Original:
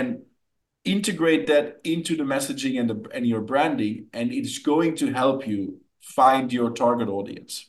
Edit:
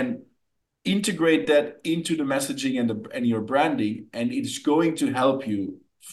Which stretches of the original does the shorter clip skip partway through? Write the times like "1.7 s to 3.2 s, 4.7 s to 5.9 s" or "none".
none